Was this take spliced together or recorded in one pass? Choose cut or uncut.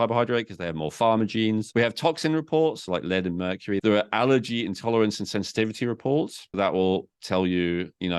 cut